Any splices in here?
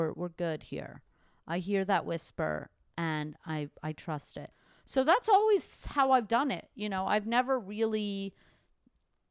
yes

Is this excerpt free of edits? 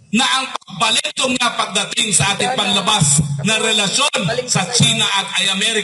yes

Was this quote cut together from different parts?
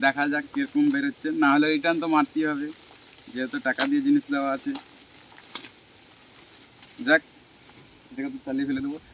no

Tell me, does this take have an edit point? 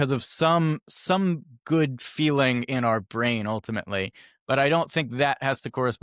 no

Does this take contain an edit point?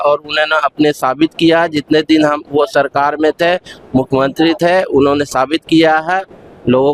no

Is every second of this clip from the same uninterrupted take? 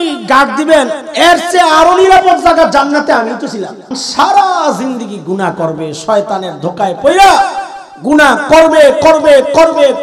no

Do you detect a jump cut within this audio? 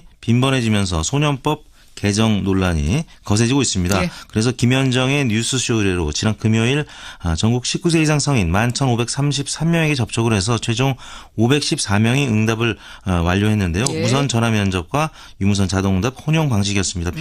yes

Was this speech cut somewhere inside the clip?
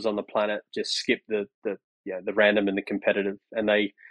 no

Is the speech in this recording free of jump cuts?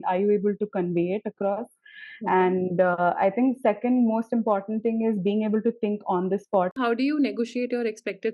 no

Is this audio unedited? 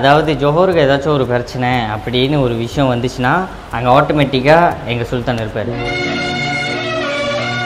yes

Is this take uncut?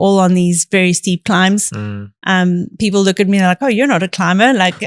yes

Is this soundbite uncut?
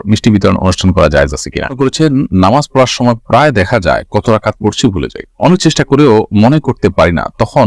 no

